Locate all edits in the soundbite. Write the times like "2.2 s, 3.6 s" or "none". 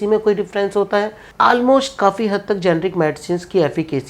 1.2 s